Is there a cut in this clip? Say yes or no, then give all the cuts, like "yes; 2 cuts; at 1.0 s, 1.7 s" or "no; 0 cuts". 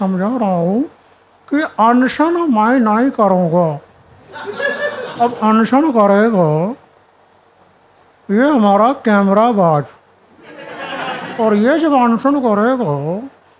no; 0 cuts